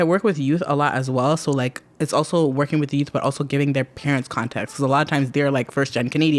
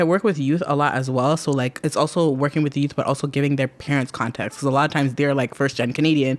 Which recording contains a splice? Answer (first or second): second